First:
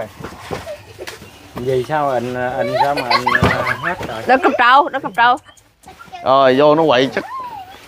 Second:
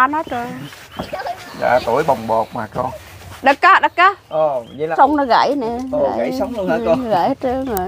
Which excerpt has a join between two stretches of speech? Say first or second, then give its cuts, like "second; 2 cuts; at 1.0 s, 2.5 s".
second; 1 cut; at 4.9 s